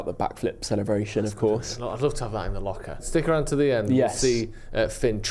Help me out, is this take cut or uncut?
cut